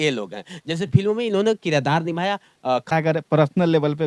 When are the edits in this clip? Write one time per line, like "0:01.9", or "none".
0:02.9

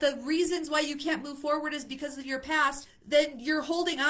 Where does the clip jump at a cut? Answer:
0:02.9

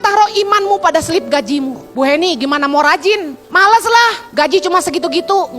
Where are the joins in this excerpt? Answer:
0:01.8
0:03.4
0:04.2

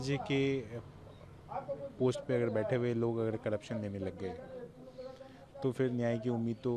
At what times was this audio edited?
none

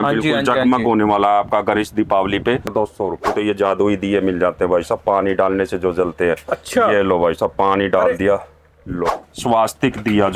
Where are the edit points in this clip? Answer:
0:03.3
0:09.0

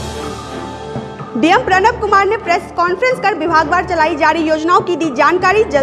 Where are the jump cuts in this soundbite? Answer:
0:01.2

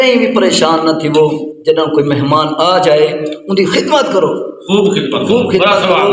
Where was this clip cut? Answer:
none

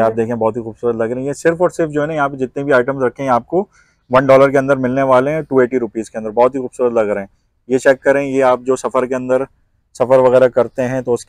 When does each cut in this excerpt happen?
none

